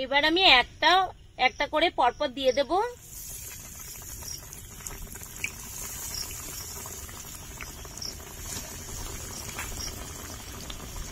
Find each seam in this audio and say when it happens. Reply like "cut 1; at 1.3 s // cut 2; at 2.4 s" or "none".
none